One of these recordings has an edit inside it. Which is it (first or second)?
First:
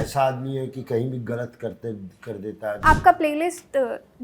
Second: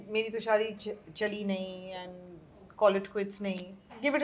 first